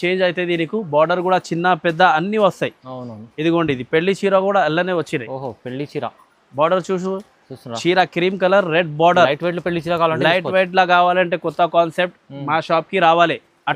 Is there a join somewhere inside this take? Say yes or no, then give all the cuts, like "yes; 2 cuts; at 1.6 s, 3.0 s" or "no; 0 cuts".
no; 0 cuts